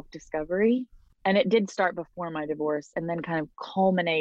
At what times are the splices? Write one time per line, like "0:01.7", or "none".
0:01.0